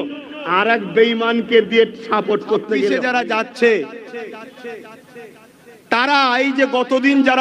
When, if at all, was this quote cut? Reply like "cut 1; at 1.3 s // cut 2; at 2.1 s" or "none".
cut 1; at 2.9 s